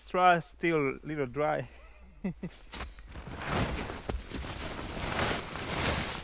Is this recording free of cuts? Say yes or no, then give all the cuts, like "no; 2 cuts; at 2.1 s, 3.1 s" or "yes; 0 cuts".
yes; 0 cuts